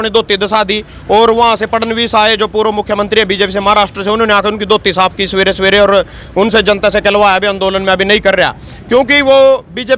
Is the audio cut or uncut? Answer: uncut